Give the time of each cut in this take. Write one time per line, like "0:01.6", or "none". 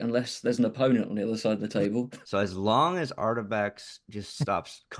0:01.9